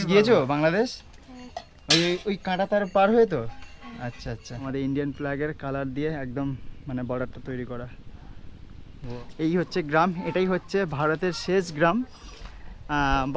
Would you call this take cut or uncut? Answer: cut